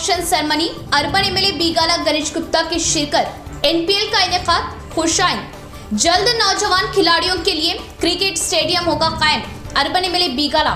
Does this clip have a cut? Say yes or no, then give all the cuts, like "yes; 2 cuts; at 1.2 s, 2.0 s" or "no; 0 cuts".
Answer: no; 0 cuts